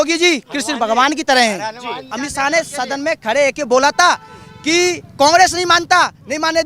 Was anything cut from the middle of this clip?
yes; 1 cut; at 2.1 s

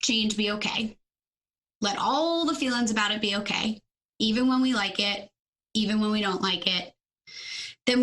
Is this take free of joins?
yes; 0 cuts

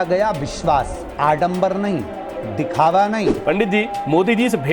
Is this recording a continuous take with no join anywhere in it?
no; 1 cut; at 3.3 s

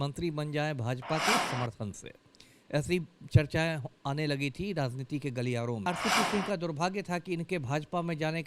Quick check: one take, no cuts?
no; 1 cut; at 5.9 s

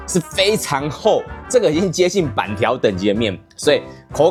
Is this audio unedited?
yes; 0 cuts

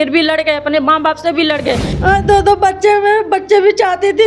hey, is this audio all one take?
no; 1 cut; at 1.9 s

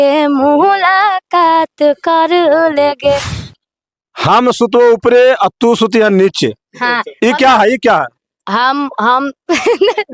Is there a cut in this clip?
yes; 1 cut; at 3.5 s

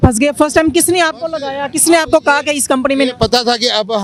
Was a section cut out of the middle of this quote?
no; 0 cuts

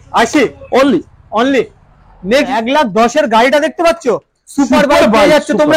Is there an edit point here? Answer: yes; 1 cut; at 2.5 s

